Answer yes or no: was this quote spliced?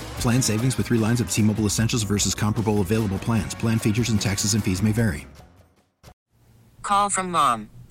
yes